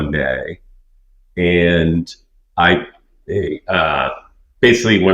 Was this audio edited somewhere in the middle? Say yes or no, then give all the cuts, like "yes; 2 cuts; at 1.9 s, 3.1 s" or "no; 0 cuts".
no; 0 cuts